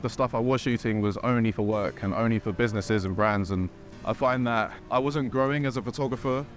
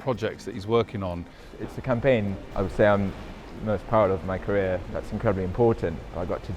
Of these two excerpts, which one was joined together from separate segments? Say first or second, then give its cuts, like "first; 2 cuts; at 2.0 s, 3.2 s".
second; 3 cuts; at 1.4 s, 2.4 s, 4.9 s